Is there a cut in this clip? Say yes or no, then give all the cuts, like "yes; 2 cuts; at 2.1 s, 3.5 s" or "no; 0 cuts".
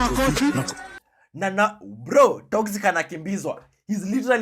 no; 0 cuts